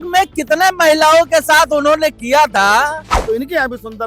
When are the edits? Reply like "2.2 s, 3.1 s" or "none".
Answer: 3.1 s